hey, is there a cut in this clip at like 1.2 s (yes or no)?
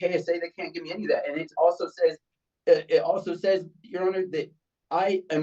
no